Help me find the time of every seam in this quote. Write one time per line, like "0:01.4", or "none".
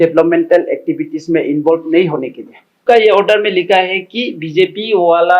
0:02.8